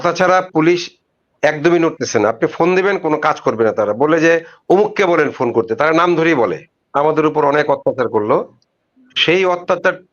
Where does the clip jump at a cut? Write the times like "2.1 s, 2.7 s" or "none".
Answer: 6.8 s